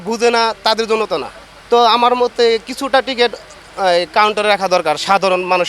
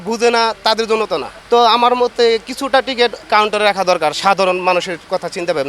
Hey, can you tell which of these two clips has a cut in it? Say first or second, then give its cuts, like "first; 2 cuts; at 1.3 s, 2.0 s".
second; 2 cuts; at 1.3 s, 3.2 s